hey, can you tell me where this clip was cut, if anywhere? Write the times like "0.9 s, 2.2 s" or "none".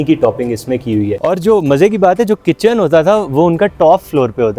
1.2 s